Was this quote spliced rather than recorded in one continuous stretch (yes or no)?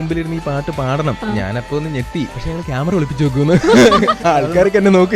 yes